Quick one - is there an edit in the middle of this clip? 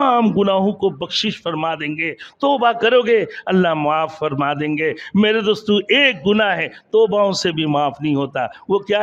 no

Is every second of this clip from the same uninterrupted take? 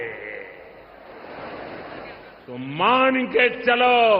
yes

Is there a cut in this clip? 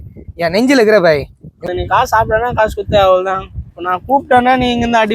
yes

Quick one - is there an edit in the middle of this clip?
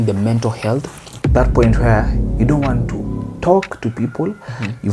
yes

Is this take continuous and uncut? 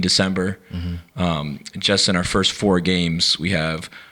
yes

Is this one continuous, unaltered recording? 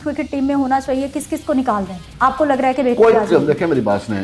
yes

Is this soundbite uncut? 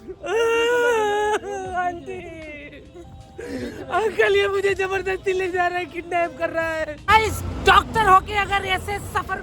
no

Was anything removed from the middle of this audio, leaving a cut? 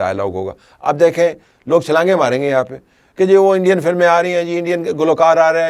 no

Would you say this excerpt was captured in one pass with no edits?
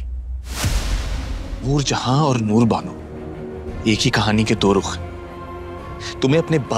no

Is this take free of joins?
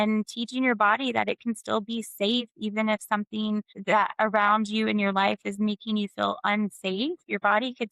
yes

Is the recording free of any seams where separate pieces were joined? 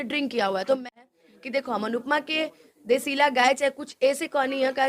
no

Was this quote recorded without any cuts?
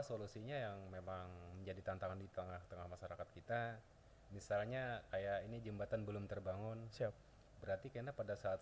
yes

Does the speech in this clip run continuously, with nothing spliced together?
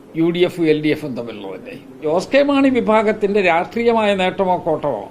no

